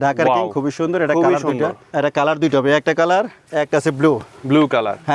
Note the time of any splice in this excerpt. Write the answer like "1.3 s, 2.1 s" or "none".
1.8 s, 3.4 s